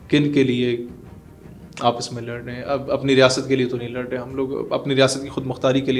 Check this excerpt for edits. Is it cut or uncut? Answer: uncut